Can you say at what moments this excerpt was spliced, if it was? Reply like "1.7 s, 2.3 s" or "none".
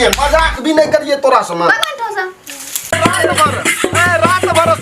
2.9 s